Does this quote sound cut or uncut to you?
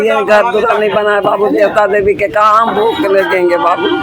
uncut